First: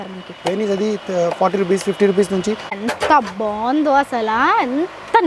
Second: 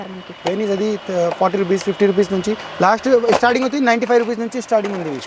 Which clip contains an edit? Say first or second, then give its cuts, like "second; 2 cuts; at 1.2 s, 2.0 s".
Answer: first; 1 cut; at 2.8 s